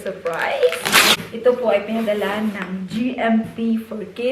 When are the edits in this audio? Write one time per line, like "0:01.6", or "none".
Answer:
0:01.2

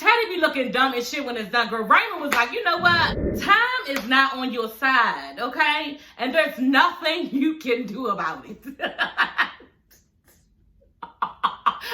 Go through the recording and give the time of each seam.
none

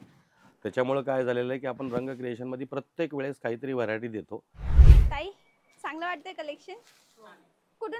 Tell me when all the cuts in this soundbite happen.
0:04.9

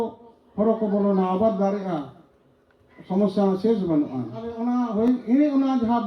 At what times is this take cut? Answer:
0:04.6

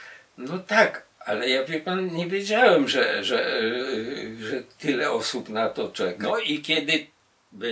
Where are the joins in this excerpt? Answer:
0:06.2

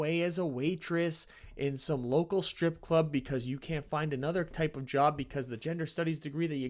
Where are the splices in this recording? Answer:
none

